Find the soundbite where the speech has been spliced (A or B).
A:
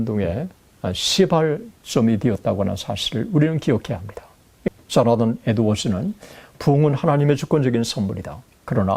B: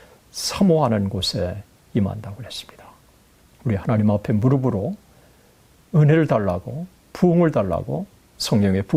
A